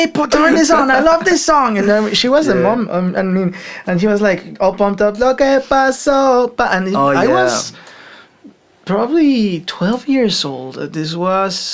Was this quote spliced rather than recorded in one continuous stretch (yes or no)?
no